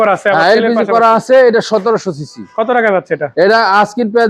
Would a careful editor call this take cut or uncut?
uncut